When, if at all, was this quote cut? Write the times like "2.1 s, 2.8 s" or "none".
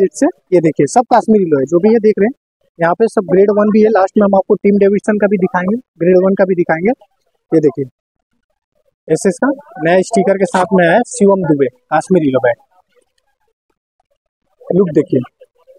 none